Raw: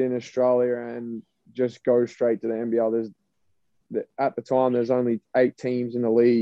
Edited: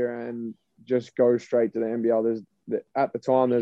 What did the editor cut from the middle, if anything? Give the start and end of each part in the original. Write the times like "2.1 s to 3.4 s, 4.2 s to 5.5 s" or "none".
3.2 s to 3.8 s